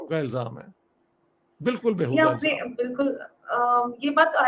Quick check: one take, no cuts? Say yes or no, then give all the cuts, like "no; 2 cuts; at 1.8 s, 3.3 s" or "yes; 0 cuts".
yes; 0 cuts